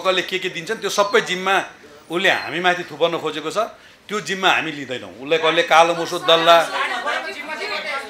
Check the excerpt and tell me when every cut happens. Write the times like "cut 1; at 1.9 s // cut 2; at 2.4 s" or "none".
none